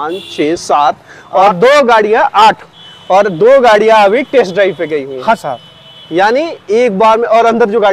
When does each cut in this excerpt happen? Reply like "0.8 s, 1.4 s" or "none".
none